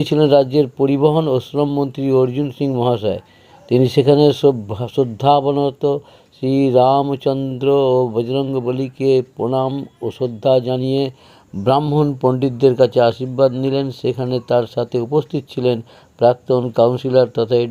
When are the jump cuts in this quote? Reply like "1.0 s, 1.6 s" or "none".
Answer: none